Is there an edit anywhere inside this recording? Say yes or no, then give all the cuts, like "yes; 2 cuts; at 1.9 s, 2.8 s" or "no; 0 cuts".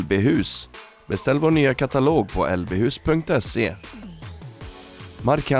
no; 0 cuts